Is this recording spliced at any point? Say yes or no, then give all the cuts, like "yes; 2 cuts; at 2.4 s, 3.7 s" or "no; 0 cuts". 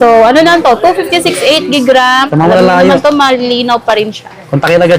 yes; 1 cut; at 2.3 s